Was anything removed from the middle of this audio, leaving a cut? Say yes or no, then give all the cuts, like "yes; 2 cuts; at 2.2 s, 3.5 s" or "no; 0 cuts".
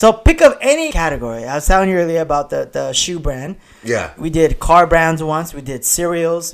yes; 1 cut; at 0.9 s